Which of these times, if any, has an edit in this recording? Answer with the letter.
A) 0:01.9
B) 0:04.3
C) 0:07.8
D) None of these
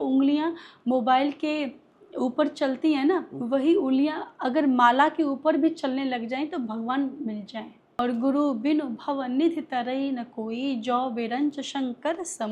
C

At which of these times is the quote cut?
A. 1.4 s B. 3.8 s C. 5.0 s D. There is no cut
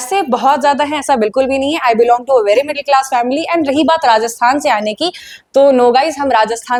D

